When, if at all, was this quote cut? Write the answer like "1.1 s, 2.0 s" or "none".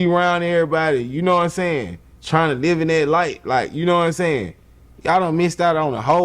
none